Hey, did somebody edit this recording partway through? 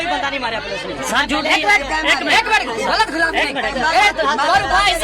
no; 0 cuts

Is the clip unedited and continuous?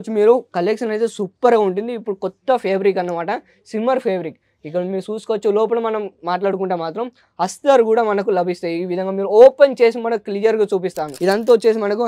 no; 1 cut; at 11.1 s

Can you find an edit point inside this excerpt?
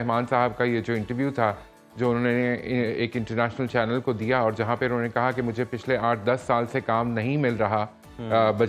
no; 0 cuts

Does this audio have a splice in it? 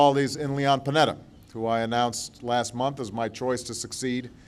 no; 0 cuts

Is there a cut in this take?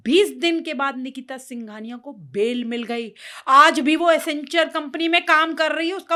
no; 0 cuts

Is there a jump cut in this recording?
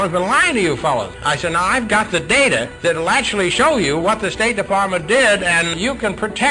yes; 3 cuts; at 1.2 s, 2.7 s, 5.7 s

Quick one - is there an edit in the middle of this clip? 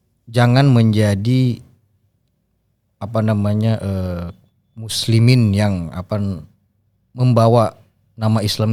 no; 0 cuts

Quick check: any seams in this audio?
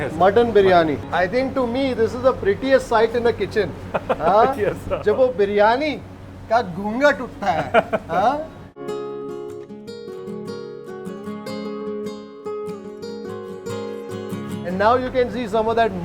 yes; 2 cuts; at 1.0 s, 8.6 s

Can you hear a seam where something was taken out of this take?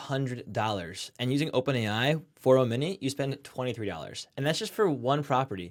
no; 0 cuts

